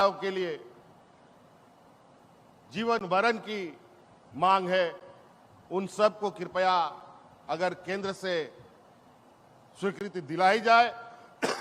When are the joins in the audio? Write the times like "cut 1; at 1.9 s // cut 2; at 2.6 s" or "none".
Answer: none